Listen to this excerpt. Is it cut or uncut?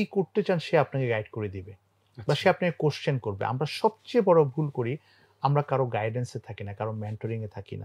uncut